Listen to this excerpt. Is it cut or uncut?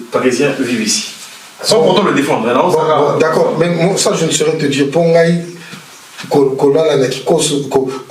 uncut